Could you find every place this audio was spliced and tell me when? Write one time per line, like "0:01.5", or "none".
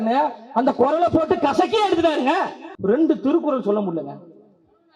0:02.6